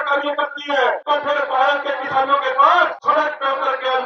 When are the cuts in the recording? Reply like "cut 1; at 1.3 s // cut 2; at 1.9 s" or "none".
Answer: cut 1; at 1.0 s // cut 2; at 3.0 s